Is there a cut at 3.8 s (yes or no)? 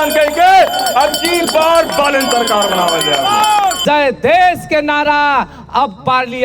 yes